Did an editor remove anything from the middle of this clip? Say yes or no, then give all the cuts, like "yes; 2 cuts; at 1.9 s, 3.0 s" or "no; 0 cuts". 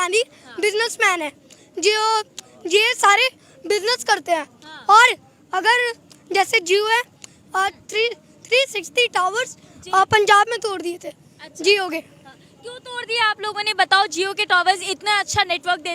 no; 0 cuts